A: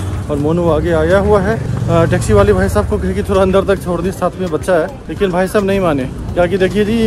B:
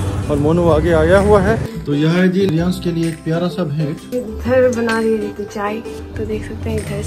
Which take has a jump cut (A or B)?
B